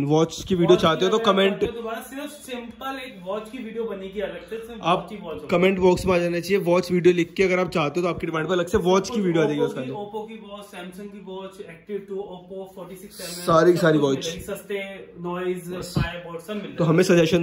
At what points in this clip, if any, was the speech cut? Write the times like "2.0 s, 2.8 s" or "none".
none